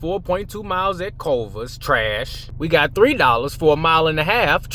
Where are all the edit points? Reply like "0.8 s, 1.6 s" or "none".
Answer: none